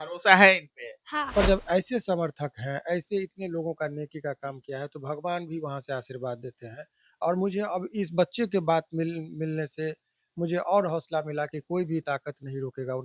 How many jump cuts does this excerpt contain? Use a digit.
1